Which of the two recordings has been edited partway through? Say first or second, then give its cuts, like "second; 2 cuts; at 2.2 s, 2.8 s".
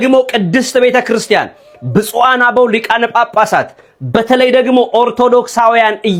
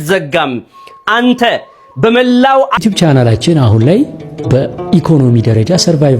second; 1 cut; at 2.7 s